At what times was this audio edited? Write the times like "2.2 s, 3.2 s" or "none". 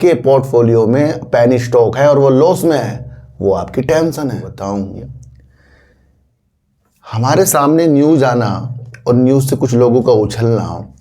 4.5 s